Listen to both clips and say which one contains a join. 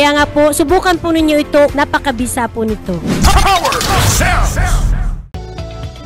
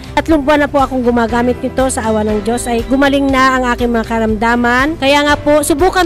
first; 1 cut; at 5.2 s

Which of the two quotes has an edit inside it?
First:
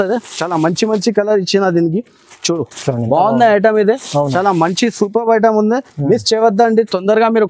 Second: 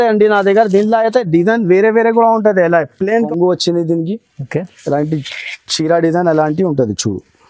second; 1 cut; at 3.3 s

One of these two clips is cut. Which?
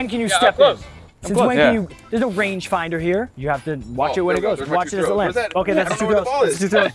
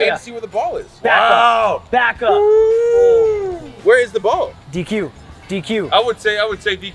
first; 1 cut; at 3.3 s

